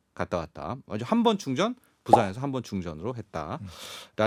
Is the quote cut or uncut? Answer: uncut